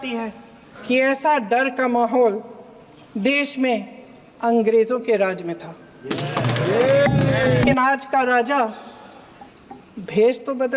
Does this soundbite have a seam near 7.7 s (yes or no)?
yes